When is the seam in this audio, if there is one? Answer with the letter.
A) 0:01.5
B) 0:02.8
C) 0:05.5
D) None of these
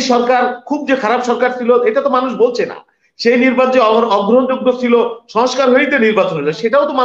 D